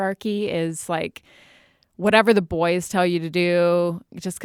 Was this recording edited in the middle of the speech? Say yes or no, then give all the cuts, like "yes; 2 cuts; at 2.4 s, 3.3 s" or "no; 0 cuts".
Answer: no; 0 cuts